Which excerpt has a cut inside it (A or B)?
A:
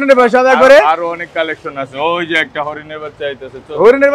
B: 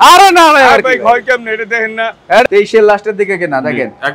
B